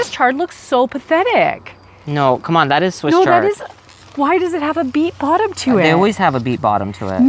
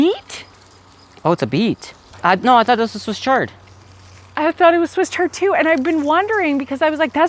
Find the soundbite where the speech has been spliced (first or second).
second